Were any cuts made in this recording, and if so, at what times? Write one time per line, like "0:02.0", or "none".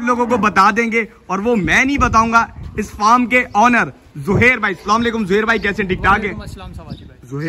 none